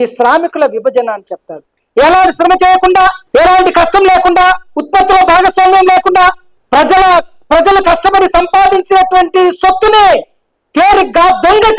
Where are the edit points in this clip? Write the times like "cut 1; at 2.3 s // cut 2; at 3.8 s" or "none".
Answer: cut 1; at 1.6 s